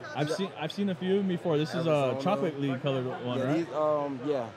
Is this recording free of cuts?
yes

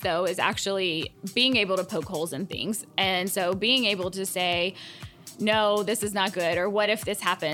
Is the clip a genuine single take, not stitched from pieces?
no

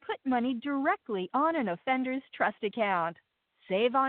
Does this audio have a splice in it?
no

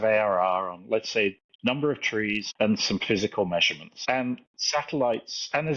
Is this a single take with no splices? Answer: no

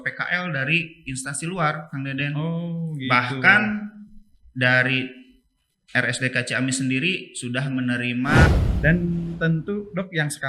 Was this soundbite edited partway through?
yes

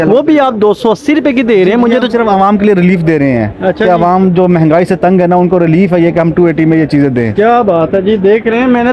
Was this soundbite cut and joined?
no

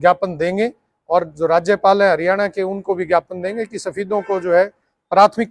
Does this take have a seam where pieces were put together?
no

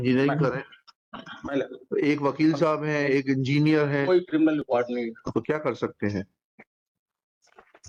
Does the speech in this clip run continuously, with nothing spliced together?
yes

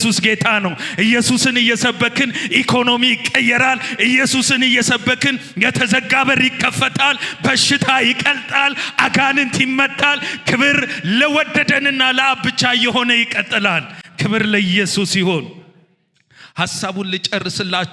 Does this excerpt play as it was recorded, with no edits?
yes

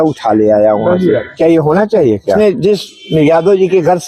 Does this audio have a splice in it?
yes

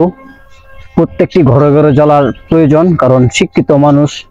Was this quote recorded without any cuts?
yes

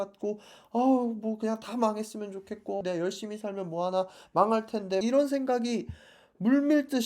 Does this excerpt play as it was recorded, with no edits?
no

